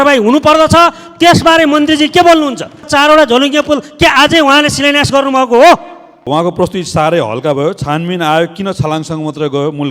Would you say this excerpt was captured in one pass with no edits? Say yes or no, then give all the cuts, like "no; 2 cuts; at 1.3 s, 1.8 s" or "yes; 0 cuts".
no; 2 cuts; at 2.9 s, 6.2 s